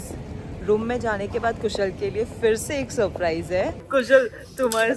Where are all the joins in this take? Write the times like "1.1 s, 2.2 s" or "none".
3.8 s